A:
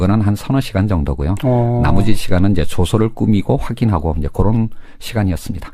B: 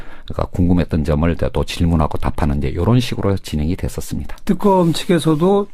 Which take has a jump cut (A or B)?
B